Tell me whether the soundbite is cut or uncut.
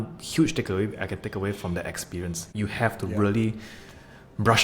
cut